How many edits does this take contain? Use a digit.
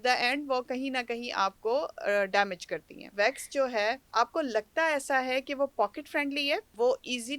1